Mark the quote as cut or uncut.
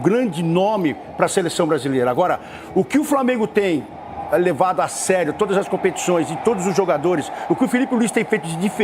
uncut